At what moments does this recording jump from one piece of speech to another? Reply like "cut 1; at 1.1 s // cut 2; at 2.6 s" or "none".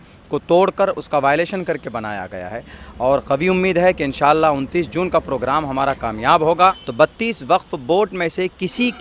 cut 1; at 2.8 s // cut 2; at 6.8 s